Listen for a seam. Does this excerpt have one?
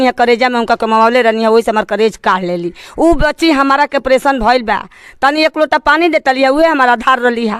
no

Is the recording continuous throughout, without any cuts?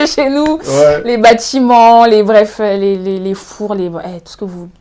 yes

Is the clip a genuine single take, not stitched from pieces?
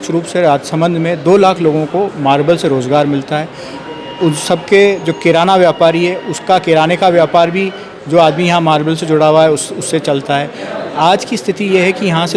yes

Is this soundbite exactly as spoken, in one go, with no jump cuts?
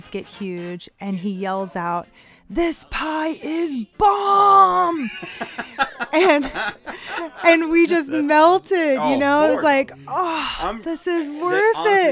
yes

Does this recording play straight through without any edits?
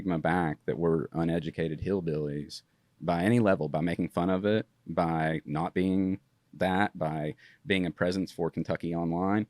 yes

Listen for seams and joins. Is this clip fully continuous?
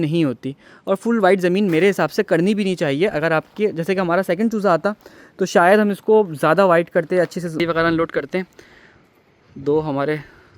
no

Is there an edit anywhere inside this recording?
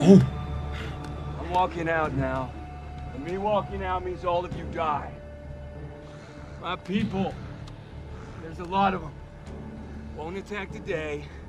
no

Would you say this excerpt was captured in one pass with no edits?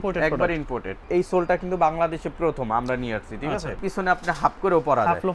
no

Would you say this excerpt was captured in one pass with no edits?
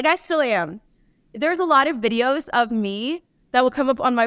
yes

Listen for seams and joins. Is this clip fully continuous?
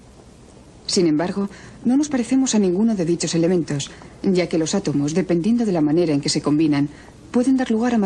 yes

